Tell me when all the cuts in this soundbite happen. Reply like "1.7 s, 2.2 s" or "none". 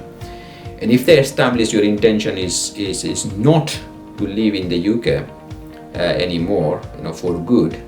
6.9 s